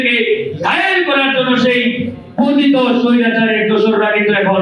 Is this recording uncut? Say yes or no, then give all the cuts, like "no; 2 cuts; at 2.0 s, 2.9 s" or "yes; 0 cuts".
yes; 0 cuts